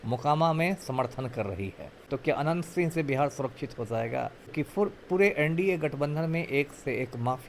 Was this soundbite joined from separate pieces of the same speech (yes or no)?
yes